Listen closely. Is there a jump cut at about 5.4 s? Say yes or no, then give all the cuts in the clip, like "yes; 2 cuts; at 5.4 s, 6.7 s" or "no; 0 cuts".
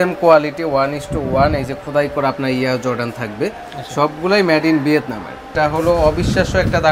yes; 1 cut; at 5.4 s